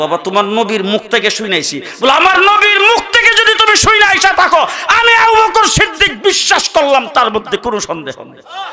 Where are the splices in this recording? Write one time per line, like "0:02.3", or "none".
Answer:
none